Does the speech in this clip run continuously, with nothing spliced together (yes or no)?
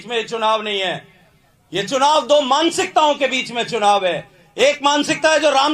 yes